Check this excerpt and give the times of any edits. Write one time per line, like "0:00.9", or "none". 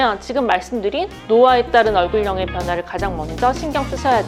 none